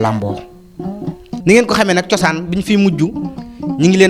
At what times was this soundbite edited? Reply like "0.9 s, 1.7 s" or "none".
1.3 s